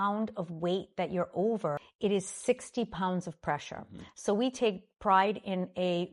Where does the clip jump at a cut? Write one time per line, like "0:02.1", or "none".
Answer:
0:01.9